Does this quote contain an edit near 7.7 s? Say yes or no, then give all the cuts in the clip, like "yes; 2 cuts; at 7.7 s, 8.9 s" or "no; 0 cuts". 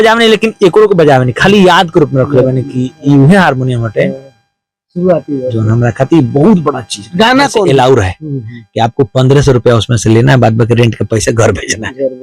yes; 1 cut; at 7.7 s